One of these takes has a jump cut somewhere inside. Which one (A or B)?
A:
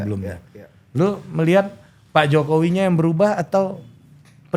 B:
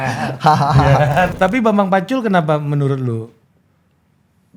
B